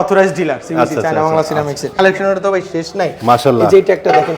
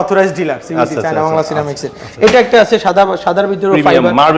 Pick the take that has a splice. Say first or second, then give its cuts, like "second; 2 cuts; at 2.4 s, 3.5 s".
first; 1 cut; at 2.0 s